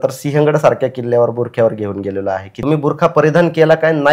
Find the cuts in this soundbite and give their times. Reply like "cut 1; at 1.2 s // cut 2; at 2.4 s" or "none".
cut 1; at 2.5 s